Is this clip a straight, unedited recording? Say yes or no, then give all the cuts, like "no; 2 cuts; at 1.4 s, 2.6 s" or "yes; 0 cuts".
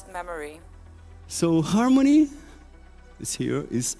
no; 1 cut; at 1.0 s